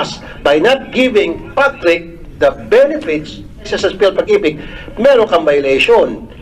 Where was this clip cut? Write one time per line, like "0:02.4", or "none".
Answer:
0:02.2
0:03.7